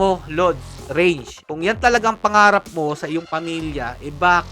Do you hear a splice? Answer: yes; 1 cut; at 1.4 s

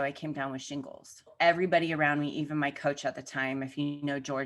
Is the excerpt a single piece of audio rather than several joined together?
no; 1 cut; at 1.3 s

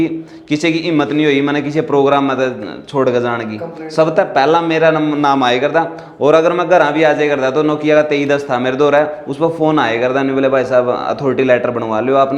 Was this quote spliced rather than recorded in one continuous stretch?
no; 0 cuts

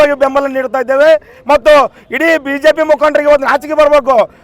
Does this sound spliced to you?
no; 0 cuts

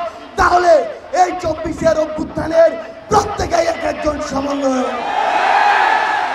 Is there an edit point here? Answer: no; 0 cuts

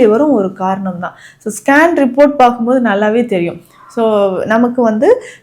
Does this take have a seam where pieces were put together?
no; 0 cuts

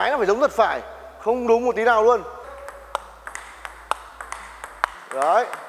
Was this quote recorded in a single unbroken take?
no; 1 cut; at 2.4 s

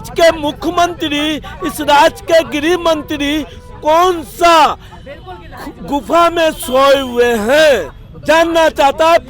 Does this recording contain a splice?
no; 0 cuts

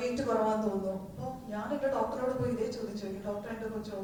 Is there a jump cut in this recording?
no; 0 cuts

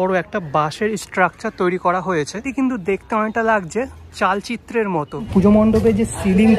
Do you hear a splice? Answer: yes; 2 cuts; at 2.5 s, 5.3 s

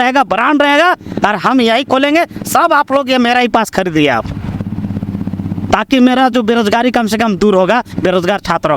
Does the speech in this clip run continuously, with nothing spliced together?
yes; 0 cuts

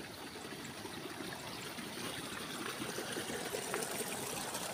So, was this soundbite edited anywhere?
no; 0 cuts

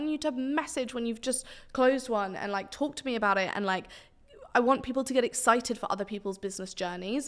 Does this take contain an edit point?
no; 0 cuts

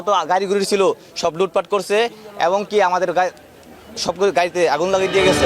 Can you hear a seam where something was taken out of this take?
no; 0 cuts

